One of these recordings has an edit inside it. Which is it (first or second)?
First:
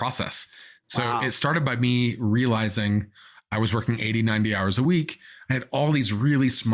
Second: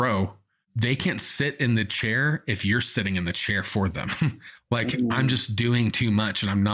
second